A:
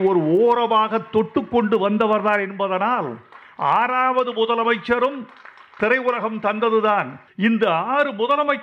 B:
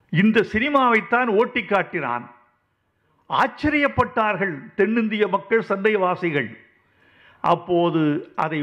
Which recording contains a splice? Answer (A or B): A